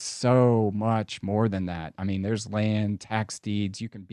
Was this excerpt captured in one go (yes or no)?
yes